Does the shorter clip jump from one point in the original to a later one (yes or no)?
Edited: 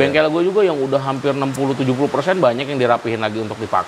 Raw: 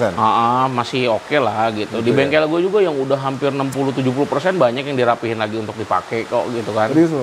no